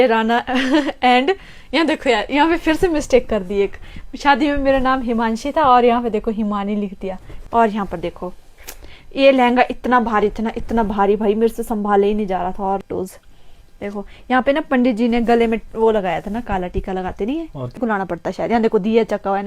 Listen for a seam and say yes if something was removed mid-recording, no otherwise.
yes